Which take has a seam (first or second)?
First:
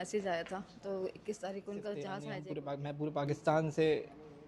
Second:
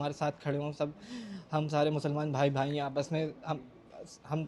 first